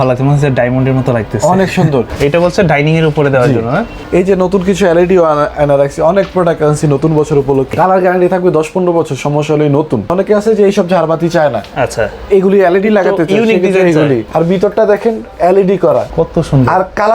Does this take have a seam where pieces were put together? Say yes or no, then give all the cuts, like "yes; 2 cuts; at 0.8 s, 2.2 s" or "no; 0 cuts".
yes; 6 cuts; at 2.1 s, 3.9 s, 7.7 s, 10.1 s, 14.3 s, 16.1 s